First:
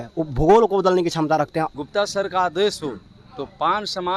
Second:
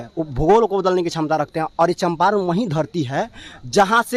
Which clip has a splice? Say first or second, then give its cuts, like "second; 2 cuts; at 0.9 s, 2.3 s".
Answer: first; 1 cut; at 1.7 s